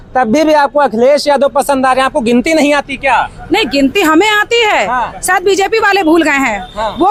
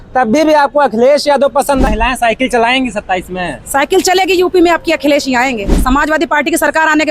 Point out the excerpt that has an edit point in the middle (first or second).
second